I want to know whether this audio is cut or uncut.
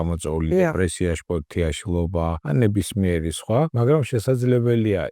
cut